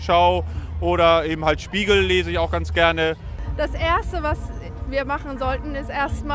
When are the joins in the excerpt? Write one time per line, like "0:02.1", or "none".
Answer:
0:03.4